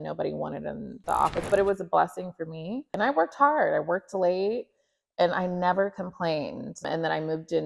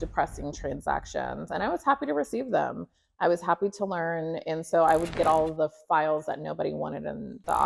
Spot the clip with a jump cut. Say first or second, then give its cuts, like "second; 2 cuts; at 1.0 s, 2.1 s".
first; 2 cuts; at 2.9 s, 6.7 s